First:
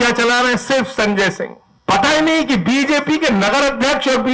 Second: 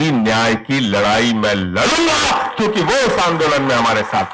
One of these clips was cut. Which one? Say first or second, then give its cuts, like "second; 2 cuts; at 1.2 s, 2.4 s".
first; 1 cut; at 1.6 s